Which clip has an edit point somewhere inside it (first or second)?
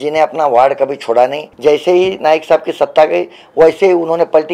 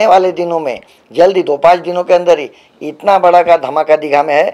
first